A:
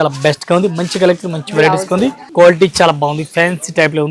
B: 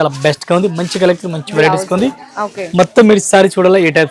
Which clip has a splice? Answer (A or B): A